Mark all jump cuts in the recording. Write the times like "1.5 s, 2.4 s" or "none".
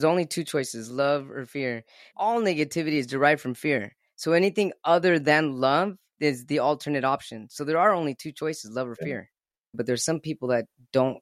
2.1 s, 6.1 s, 9.7 s